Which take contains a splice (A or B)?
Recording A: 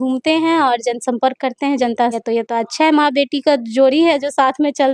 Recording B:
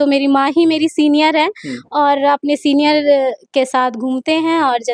A